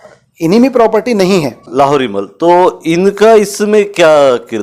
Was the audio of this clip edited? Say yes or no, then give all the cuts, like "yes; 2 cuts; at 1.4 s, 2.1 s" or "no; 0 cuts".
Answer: yes; 1 cut; at 1.6 s